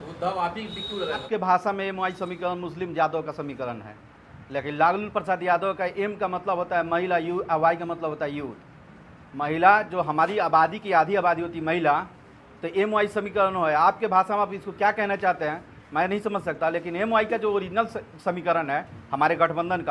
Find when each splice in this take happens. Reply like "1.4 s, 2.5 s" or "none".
1.2 s